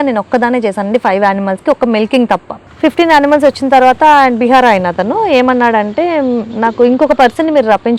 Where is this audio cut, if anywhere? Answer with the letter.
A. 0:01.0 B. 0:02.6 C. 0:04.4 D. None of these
B